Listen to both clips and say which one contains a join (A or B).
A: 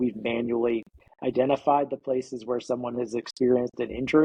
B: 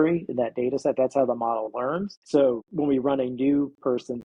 B